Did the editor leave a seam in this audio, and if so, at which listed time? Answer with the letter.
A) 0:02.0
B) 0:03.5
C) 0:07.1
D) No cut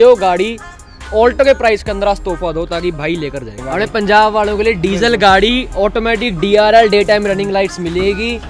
B